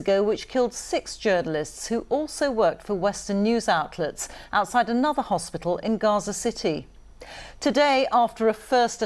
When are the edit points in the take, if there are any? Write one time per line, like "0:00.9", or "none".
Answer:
0:03.2